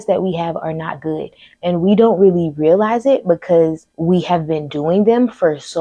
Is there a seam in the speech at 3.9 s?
yes; 1 cut; at 3.9 s

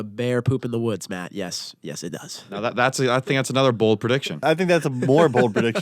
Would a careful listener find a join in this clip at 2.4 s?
yes; 2 cuts; at 2.4 s, 4.4 s

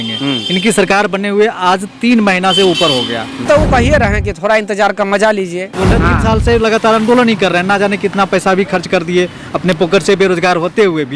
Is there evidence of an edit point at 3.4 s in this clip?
yes; 2 cuts; at 3.4 s, 5.8 s

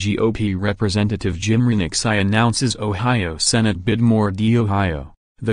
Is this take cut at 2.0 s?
no; 1 cut; at 3.9 s

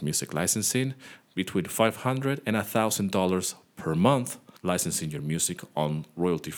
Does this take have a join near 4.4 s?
yes; 1 cut; at 4.4 s

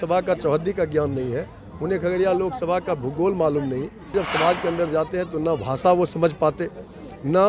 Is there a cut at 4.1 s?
yes; 1 cut; at 4.1 s

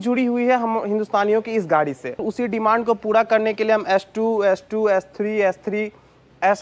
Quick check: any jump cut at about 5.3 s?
no; 1 cut; at 2.2 s

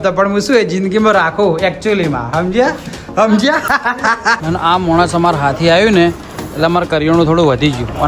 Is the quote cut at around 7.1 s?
no; 1 cut; at 4.4 s

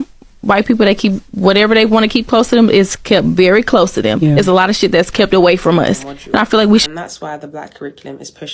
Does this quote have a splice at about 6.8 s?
yes; 1 cut; at 6.8 s

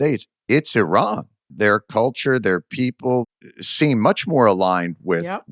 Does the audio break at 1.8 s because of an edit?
no; 1 cut; at 3.3 s

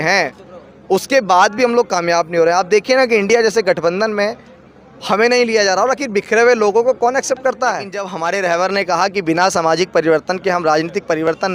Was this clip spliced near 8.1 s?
yes; 1 cut; at 8.1 s

